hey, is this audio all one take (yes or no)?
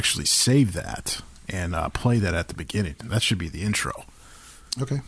yes